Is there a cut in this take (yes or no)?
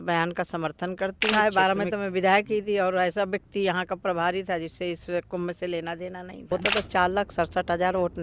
yes